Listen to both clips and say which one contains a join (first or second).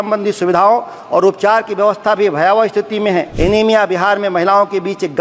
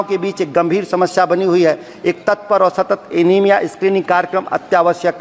first